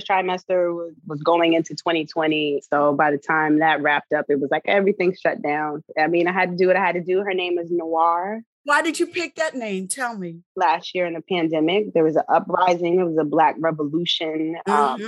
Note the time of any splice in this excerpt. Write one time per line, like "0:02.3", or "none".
0:01.0
0:02.6
0:05.9
0:08.6
0:10.5